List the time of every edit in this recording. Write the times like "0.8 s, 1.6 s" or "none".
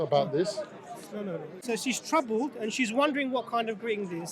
1.5 s